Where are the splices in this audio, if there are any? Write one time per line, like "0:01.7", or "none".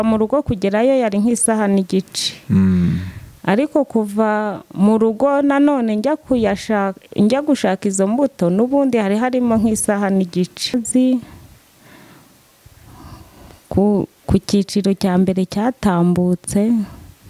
0:10.7